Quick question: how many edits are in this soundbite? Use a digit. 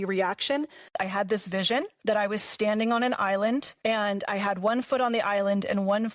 1